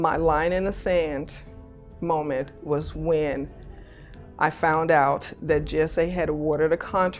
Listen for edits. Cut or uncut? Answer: uncut